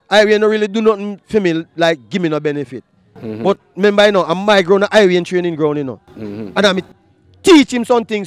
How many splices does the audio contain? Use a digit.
0